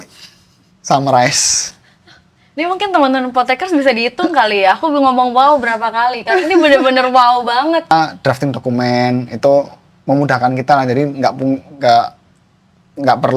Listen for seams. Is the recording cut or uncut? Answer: cut